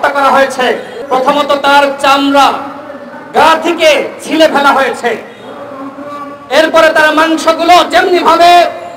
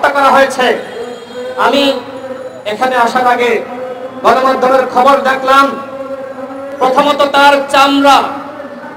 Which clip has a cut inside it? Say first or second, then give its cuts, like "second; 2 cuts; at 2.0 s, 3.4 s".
first; 1 cut; at 0.9 s